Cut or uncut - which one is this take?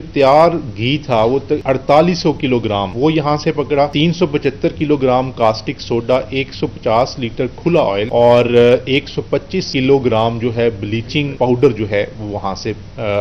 cut